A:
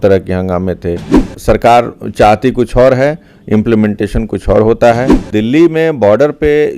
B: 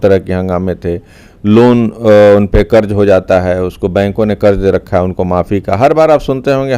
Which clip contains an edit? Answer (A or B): A